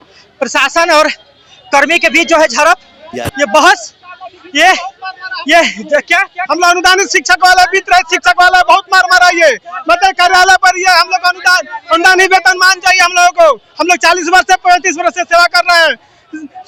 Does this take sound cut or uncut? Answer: uncut